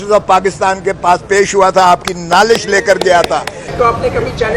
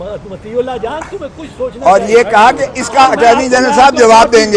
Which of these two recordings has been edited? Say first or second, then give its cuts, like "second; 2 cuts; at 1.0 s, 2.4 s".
first; 1 cut; at 3.6 s